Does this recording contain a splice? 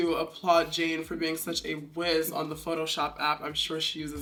no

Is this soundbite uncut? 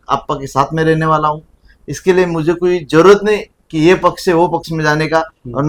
yes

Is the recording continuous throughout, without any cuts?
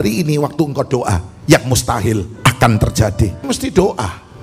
no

